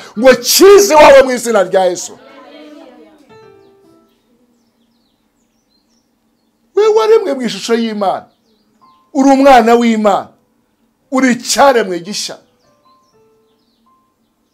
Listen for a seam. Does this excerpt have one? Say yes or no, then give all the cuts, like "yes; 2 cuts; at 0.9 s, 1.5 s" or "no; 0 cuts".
no; 0 cuts